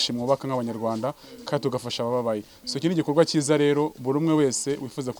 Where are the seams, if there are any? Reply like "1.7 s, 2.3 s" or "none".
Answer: none

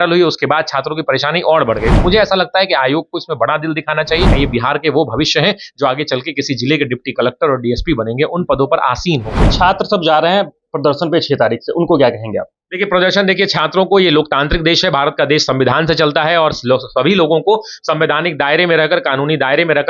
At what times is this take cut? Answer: 4.3 s, 9.5 s

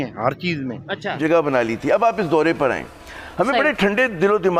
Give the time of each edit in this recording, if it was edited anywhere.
1.1 s

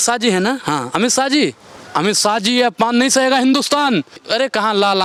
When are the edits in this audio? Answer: none

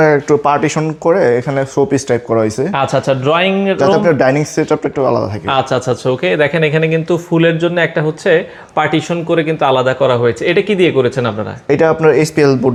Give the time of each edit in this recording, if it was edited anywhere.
none

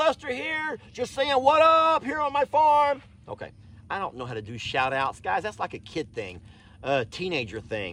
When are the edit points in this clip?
none

